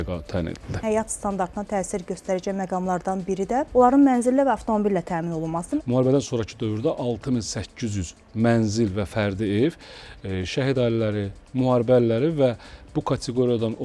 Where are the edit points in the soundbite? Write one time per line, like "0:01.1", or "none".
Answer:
0:00.8
0:03.7
0:05.8